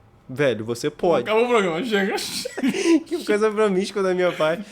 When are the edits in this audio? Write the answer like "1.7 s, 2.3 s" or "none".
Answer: 1.2 s